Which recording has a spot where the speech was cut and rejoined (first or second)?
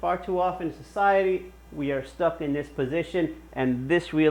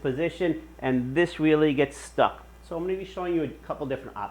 second